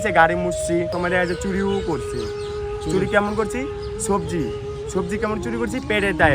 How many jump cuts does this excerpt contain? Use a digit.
1